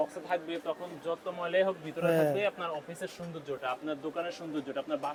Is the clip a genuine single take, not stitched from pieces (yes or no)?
yes